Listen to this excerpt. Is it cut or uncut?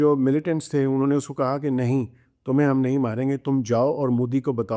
uncut